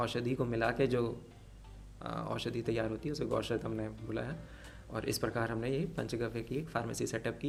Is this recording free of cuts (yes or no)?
yes